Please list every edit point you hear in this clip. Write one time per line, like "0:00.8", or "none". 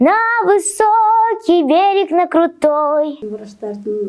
0:03.2